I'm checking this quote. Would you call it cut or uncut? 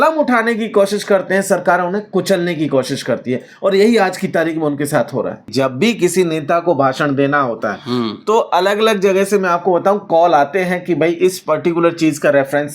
cut